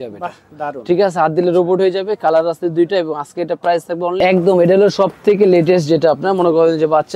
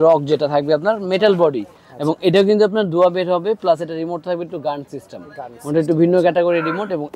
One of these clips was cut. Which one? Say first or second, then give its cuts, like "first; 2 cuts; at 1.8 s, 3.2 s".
first; 1 cut; at 4.2 s